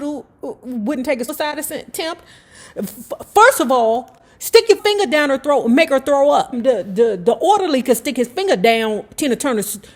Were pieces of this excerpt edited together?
yes; 3 cuts; at 1.3 s, 4.8 s, 6.5 s

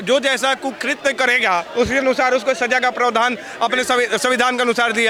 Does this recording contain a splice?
no; 0 cuts

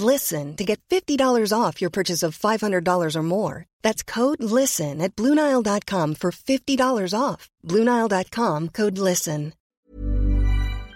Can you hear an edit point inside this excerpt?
yes; 1 cut; at 9.6 s

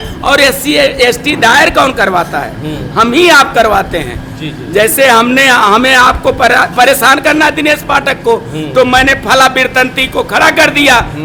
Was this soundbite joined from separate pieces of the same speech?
no; 0 cuts

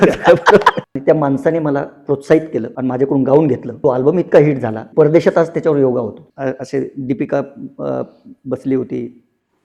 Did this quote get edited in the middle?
yes; 5 cuts; at 0.8 s, 2.7 s, 3.7 s, 4.8 s, 6.2 s

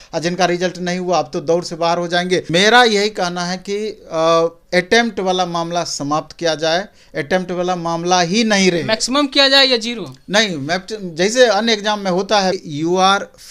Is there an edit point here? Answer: yes; 2 cuts; at 2.5 s, 12.6 s

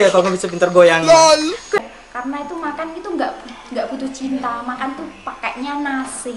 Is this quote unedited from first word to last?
no; 1 cut; at 1.8 s

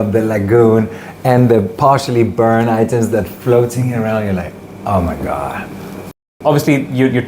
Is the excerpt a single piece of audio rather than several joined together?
no; 1 cut; at 6.4 s

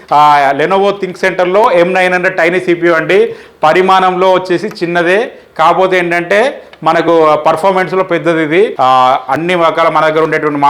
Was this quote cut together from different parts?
yes; 1 cut; at 8.7 s

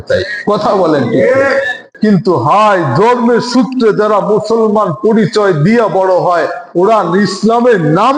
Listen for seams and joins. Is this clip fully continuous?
no; 1 cut; at 1.9 s

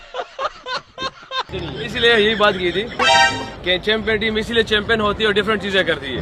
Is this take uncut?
no; 1 cut; at 1.5 s

